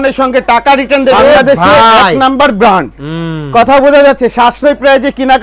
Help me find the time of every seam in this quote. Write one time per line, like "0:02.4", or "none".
0:01.2

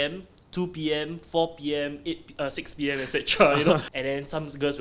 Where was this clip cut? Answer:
0:03.9

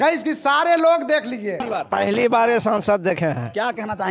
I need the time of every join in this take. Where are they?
0:01.7

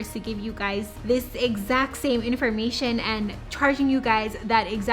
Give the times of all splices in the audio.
0:00.9
0:03.4

